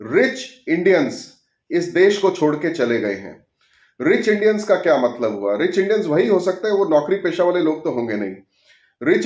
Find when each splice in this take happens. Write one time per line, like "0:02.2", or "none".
none